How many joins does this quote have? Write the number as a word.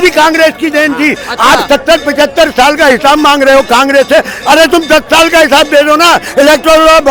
zero